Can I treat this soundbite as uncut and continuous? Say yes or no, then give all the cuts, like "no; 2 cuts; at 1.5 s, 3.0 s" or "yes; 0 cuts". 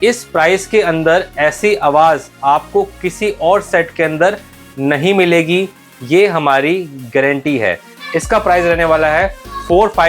no; 1 cut; at 7.8 s